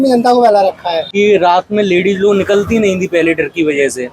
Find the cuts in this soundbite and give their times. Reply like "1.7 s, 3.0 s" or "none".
1.1 s

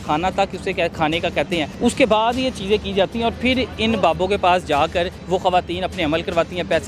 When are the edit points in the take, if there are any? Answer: 1.7 s, 5.2 s

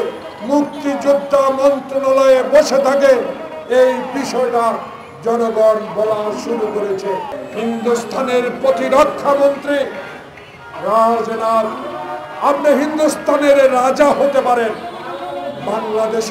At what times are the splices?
7.4 s

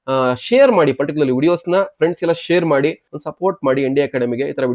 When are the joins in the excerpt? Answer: 3.1 s

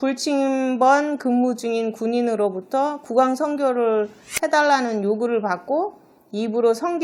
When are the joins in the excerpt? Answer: none

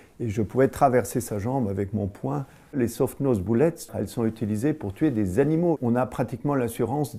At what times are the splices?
3.9 s, 5.7 s

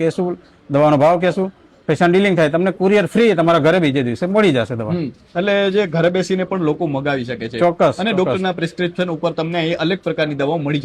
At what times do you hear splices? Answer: none

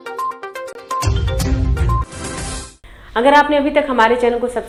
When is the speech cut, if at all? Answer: none

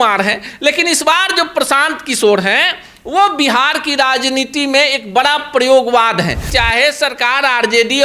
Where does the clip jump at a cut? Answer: 6.5 s

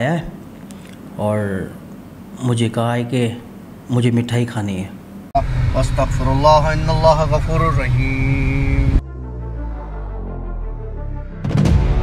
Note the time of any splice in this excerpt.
5.3 s

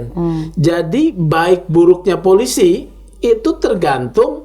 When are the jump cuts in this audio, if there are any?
none

